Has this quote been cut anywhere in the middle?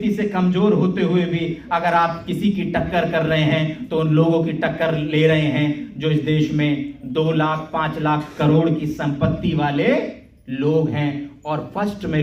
no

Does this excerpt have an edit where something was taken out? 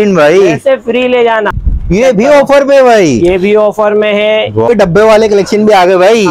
yes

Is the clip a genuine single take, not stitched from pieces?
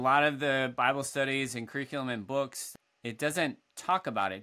no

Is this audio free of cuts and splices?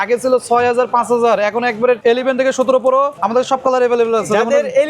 no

